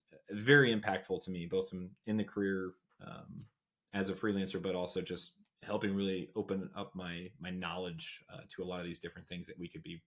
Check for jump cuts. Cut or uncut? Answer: uncut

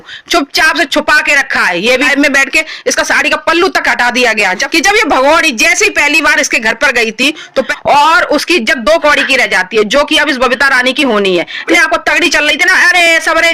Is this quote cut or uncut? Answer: cut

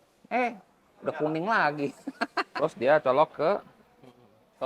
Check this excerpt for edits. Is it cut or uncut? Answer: cut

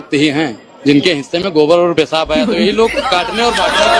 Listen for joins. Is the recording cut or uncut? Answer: uncut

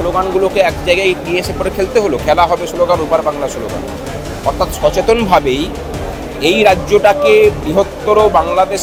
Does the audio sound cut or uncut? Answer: uncut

